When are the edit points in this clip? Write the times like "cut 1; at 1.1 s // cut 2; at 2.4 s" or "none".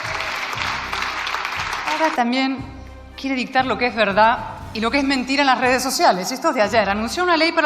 cut 1; at 1.8 s